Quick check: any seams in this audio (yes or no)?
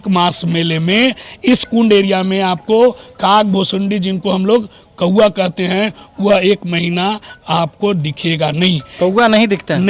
no